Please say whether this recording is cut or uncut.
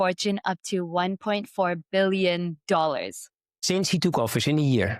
cut